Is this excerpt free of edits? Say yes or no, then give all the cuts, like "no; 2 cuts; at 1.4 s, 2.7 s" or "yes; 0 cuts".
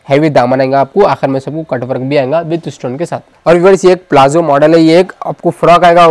yes; 0 cuts